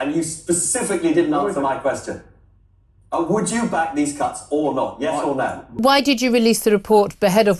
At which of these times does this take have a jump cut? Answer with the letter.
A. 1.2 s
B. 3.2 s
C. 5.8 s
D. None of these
C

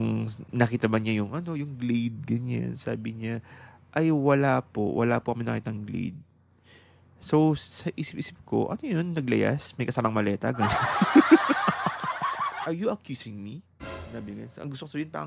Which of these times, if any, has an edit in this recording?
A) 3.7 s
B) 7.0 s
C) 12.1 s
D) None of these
C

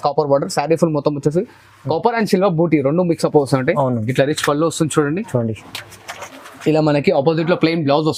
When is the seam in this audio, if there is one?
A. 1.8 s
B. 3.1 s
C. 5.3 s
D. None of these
D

